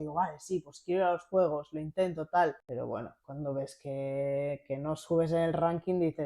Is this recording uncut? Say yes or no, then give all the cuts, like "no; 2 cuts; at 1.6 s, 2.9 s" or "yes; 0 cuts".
no; 1 cut; at 2.6 s